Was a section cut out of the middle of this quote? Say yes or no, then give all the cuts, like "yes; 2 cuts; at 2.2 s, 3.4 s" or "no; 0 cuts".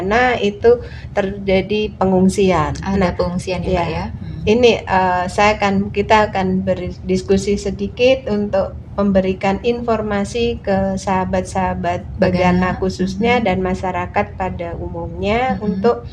no; 0 cuts